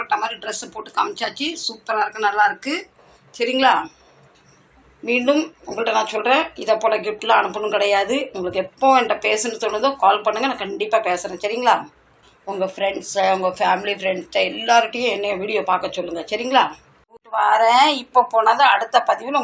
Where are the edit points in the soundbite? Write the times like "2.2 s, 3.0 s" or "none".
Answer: 17.2 s